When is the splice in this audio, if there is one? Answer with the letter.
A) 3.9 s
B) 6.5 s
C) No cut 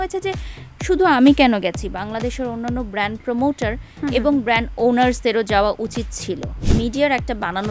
B